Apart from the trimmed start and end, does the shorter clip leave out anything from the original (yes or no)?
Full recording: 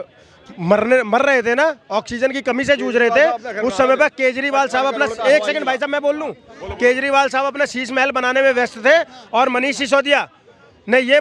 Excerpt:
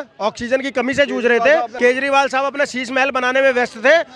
yes